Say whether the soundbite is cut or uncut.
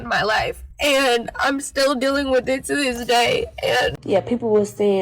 cut